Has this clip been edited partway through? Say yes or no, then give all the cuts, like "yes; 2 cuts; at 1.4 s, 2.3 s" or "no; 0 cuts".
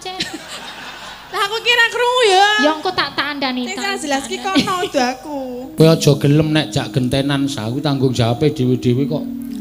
yes; 1 cut; at 5.7 s